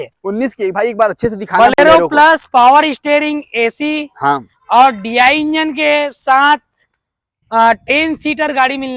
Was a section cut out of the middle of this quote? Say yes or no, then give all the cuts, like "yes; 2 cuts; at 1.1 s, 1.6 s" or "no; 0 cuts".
no; 0 cuts